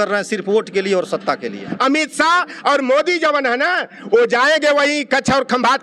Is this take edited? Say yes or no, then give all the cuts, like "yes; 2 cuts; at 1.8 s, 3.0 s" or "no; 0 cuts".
yes; 1 cut; at 1.7 s